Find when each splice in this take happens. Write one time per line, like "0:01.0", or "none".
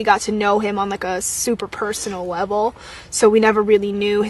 0:02.7